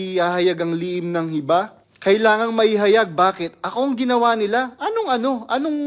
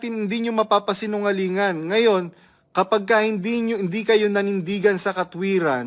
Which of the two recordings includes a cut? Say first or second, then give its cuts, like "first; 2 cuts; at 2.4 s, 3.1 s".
first; 1 cut; at 1.8 s